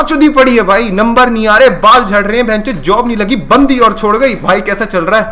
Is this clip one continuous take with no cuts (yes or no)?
yes